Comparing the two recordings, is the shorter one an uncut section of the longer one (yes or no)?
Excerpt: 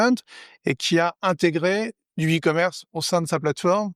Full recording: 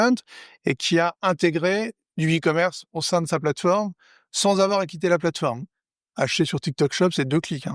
yes